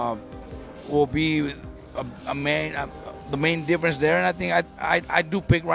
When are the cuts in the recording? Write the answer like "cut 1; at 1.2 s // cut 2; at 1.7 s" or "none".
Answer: none